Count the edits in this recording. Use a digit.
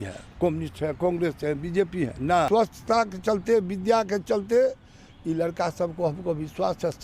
1